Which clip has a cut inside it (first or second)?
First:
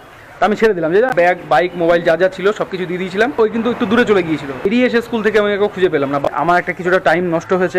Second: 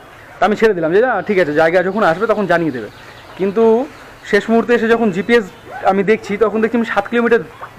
first